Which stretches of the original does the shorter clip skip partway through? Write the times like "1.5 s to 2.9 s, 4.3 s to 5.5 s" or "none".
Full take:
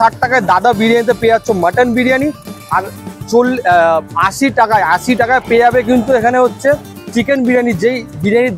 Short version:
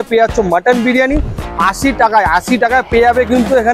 2.6 s to 4.1 s